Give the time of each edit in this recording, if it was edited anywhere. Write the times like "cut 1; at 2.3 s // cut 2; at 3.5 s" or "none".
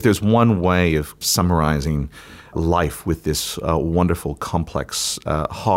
cut 1; at 1.2 s